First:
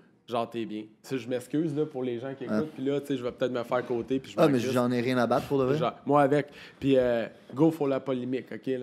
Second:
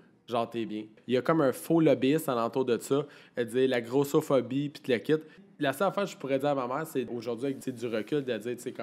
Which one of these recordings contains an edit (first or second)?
second